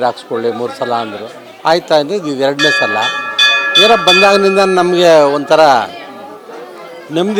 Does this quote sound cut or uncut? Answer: uncut